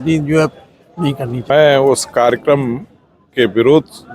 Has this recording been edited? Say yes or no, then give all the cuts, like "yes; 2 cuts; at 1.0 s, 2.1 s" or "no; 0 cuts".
yes; 1 cut; at 1.5 s